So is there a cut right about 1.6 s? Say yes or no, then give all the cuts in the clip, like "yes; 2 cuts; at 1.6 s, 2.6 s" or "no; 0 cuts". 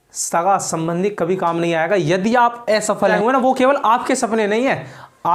no; 1 cut; at 3.1 s